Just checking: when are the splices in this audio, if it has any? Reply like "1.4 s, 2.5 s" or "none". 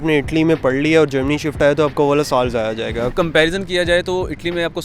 3.1 s